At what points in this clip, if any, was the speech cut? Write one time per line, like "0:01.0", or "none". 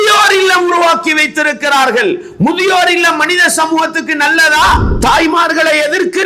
0:04.9